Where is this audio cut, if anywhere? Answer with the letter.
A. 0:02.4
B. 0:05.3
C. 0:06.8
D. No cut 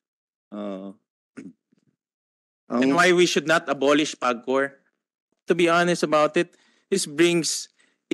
B